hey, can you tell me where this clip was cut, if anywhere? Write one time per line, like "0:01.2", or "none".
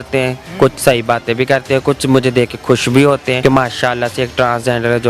0:03.4